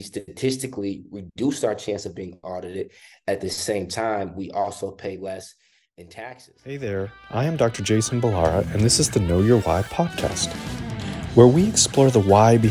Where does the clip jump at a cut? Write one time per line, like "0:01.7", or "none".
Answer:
0:06.9